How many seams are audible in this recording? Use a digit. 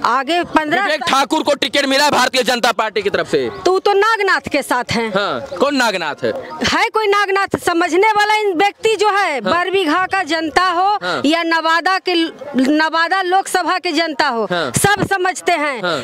0